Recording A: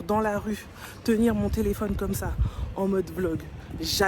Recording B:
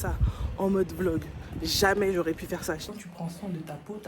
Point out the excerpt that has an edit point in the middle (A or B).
B